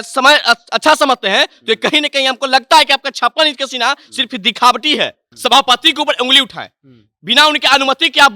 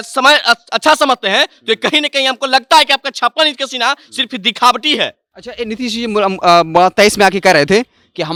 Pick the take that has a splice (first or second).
first